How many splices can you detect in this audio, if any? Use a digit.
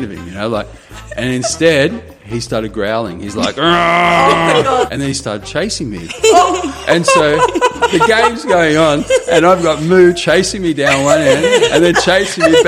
1